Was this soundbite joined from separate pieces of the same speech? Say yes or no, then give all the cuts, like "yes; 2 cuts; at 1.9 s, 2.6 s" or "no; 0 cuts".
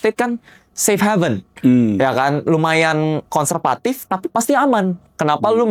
no; 0 cuts